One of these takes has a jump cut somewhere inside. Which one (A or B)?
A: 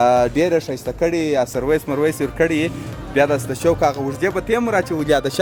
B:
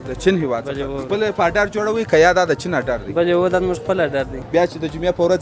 B